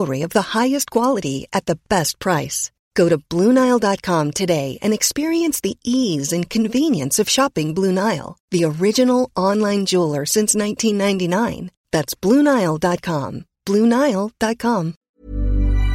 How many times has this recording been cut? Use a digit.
1